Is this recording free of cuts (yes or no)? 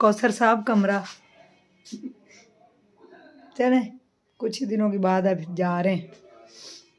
yes